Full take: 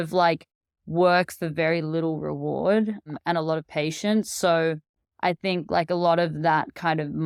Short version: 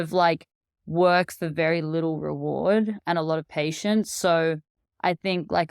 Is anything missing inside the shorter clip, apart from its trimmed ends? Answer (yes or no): yes